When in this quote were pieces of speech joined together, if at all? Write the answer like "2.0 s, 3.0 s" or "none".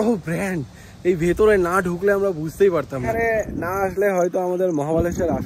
3.0 s